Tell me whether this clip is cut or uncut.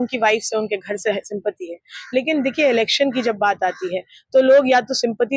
uncut